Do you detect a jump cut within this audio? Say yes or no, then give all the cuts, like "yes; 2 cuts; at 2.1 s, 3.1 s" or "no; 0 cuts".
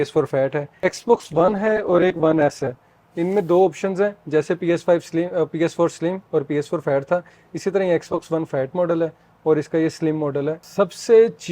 yes; 2 cuts; at 0.8 s, 10.6 s